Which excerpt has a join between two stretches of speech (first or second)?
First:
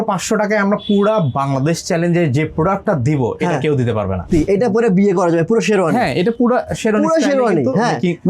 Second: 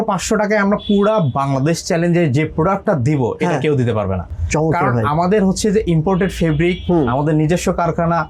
first